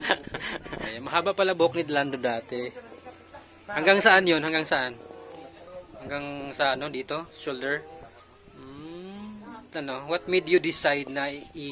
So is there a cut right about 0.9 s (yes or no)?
yes